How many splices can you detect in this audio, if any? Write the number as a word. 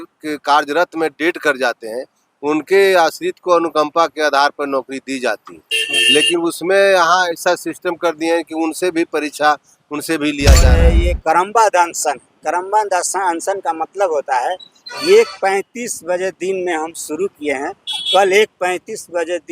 one